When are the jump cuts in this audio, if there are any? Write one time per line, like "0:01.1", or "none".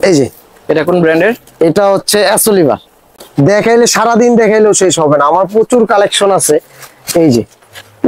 0:03.3